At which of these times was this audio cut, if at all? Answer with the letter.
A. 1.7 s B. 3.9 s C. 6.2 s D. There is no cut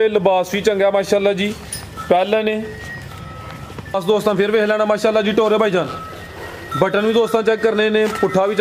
B